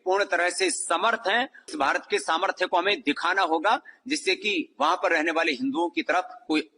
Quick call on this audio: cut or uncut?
cut